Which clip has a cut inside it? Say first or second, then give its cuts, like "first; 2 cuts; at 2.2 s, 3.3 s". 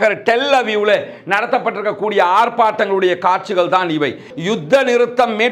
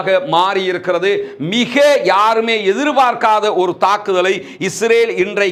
first; 1 cut; at 4.3 s